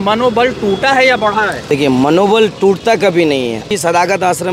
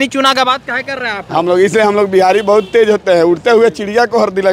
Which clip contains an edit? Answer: first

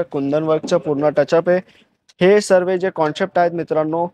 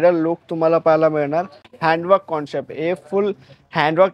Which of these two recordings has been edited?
second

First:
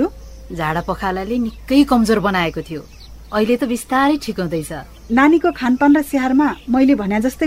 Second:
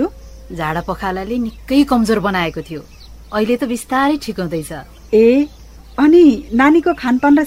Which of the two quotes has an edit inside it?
first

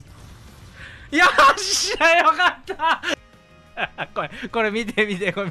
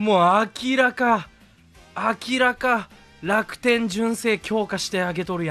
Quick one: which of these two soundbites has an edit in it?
first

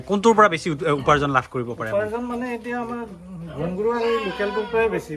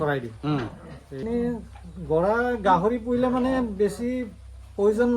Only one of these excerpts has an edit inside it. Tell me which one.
second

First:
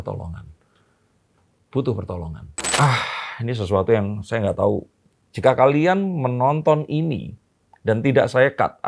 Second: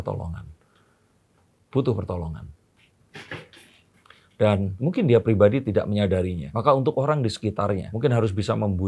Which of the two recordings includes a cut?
first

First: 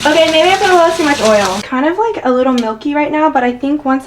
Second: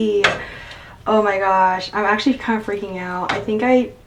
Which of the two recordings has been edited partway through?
first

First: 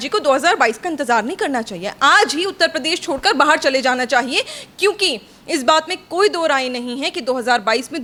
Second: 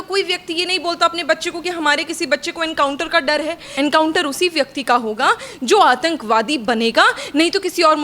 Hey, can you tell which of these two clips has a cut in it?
second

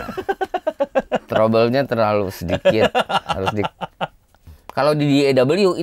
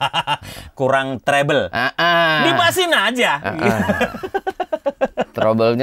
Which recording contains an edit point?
first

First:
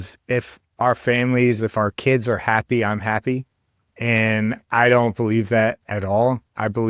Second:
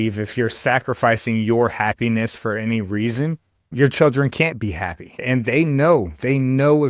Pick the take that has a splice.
second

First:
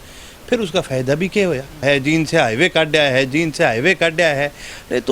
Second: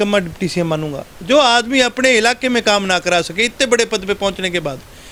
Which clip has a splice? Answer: first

